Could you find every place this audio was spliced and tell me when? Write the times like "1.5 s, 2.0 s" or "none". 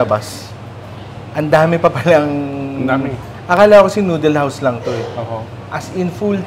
none